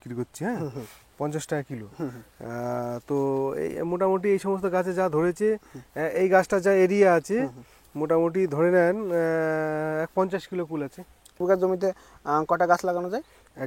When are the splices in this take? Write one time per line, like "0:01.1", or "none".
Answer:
0:11.4